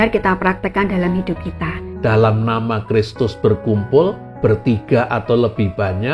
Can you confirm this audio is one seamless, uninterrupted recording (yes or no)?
no